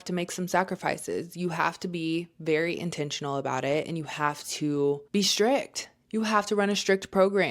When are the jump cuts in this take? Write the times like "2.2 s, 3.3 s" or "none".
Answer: 5.0 s